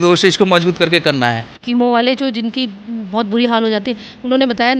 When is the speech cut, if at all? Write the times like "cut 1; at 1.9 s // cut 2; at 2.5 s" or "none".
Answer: cut 1; at 1.5 s